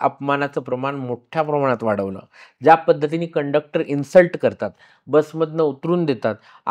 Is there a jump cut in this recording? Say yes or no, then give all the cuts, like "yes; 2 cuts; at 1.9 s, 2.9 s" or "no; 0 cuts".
no; 0 cuts